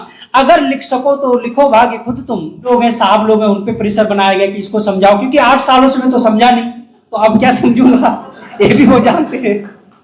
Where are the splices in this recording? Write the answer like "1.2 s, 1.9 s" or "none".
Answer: 2.7 s